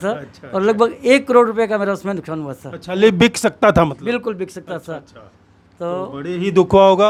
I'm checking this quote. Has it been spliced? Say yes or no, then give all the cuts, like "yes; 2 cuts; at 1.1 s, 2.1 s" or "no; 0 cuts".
no; 0 cuts